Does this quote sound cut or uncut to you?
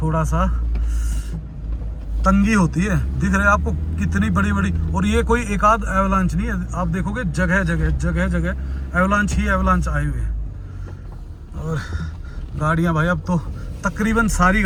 uncut